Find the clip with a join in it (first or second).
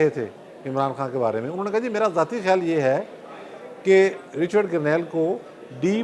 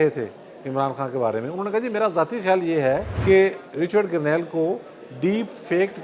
second